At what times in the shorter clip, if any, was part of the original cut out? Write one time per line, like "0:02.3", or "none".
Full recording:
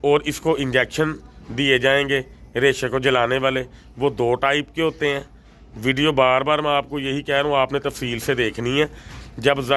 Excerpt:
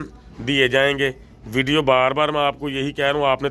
0:01.3

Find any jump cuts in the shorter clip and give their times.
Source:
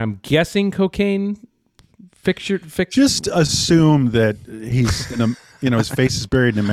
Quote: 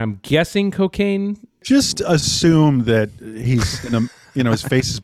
0:01.6

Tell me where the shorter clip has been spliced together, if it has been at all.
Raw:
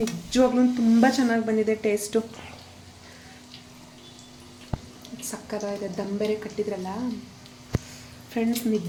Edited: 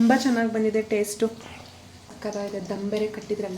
0:02.2

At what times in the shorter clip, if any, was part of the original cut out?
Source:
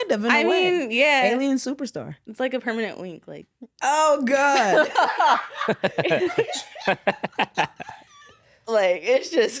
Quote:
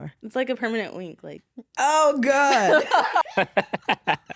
0:03.2

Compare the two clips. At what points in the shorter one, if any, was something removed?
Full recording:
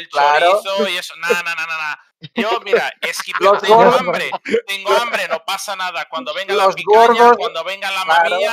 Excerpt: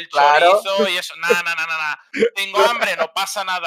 0:02.0

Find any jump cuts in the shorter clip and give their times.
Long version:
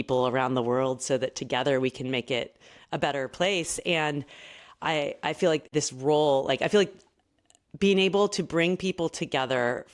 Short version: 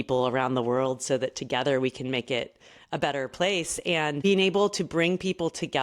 0:04.2

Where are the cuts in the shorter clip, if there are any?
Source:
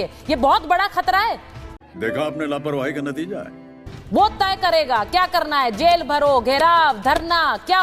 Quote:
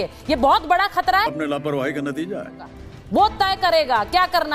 0:01.3

